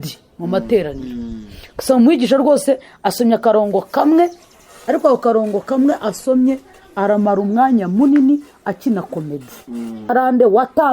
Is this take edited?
yes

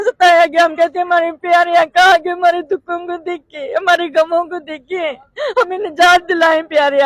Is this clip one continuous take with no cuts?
yes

